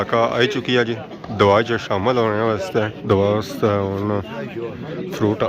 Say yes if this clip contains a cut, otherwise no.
yes